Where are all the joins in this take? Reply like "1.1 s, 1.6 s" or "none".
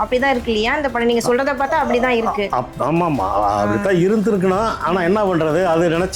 none